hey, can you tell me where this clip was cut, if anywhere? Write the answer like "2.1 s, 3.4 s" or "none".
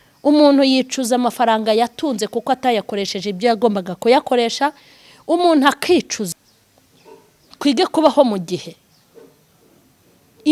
6.3 s